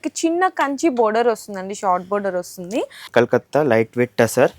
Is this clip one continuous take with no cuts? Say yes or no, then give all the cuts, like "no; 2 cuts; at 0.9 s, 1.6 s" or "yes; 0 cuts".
no; 1 cut; at 3.1 s